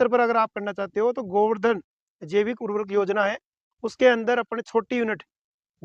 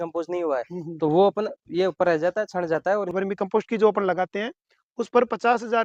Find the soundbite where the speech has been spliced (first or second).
second